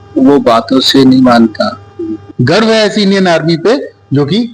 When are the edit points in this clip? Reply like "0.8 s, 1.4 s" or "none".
2.3 s